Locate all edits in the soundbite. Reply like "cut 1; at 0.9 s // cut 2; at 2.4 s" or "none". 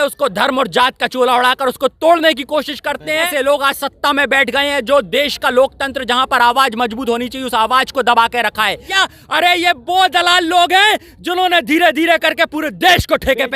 cut 1; at 3.3 s // cut 2; at 8.9 s

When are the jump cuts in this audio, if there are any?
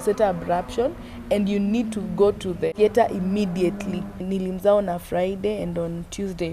cut 1; at 2.7 s // cut 2; at 4.2 s

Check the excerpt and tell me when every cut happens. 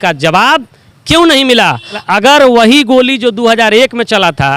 cut 1; at 2.0 s

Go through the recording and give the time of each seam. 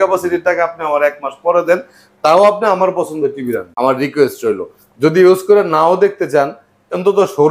cut 1; at 3.7 s

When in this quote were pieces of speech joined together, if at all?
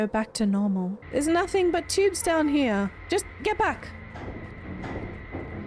cut 1; at 1.0 s

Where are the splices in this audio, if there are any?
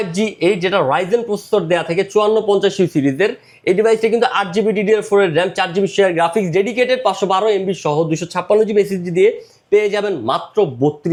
none

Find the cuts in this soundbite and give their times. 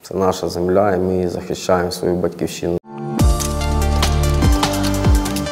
cut 1; at 2.8 s

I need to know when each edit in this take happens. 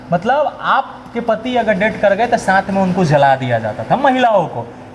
none

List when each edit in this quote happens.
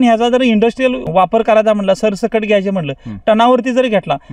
cut 1; at 1.0 s

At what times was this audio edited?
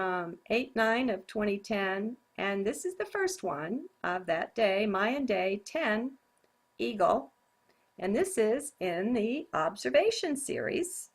cut 1; at 2.3 s

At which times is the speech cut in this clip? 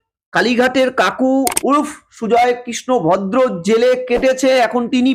none

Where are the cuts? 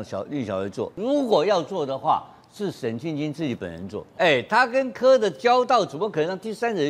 cut 1; at 0.9 s // cut 2; at 4.1 s

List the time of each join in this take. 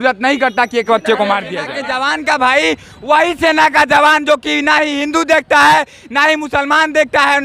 cut 1; at 1.7 s

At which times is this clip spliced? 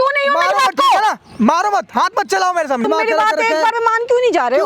cut 1; at 2.9 s

